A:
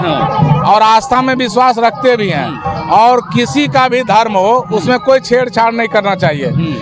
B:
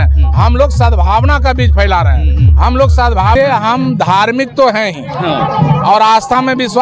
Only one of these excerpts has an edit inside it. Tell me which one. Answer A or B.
B